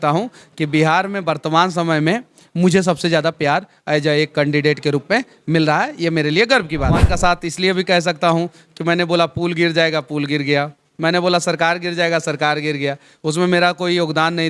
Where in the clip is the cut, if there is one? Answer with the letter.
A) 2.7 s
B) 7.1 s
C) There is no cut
B